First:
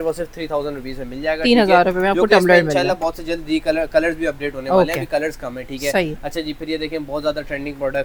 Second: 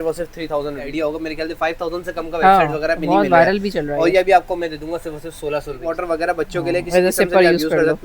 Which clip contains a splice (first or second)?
second